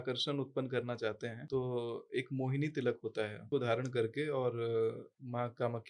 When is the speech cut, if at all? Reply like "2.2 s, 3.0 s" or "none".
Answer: 1.4 s, 3.4 s